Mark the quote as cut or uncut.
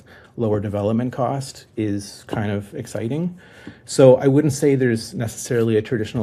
uncut